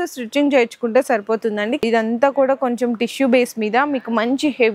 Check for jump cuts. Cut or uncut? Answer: cut